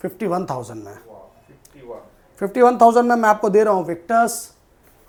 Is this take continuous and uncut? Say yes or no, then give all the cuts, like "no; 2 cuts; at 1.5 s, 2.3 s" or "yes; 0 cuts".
yes; 0 cuts